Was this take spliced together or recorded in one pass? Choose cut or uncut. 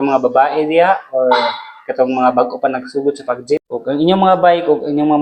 cut